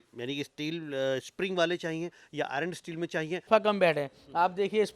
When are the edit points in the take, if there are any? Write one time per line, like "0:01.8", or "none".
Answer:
0:03.5